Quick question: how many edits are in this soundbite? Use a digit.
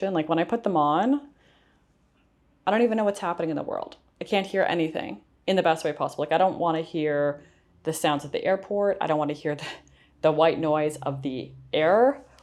0